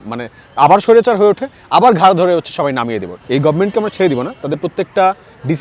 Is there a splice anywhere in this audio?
yes; 1 cut; at 3.1 s

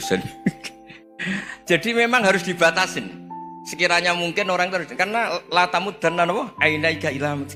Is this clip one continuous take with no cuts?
yes; 0 cuts

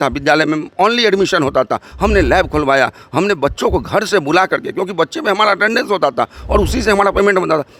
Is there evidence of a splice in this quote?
no; 0 cuts

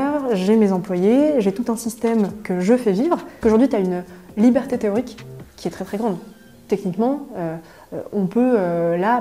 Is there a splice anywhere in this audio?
yes; 1 cut; at 3.3 s

